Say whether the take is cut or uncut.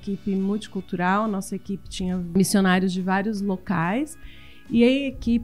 cut